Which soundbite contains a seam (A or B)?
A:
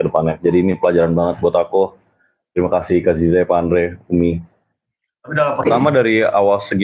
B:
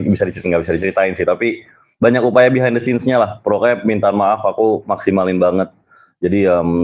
A